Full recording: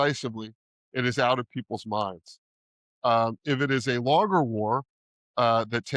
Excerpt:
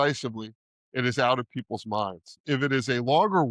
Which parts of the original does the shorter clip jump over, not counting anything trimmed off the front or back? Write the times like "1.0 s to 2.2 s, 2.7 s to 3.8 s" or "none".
2.4 s to 3.4 s